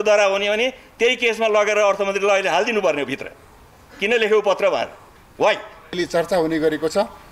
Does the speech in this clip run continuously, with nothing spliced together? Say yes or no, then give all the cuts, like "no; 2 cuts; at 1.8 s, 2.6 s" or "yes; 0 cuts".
no; 1 cut; at 5.9 s